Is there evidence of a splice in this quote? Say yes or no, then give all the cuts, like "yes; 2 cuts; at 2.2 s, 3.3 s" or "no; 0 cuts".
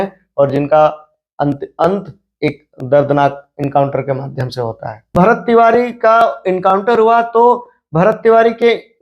yes; 1 cut; at 5.1 s